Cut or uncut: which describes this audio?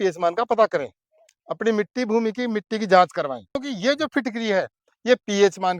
cut